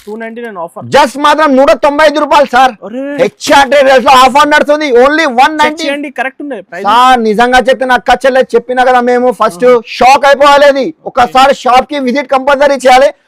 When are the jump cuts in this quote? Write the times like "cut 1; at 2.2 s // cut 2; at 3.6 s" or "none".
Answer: none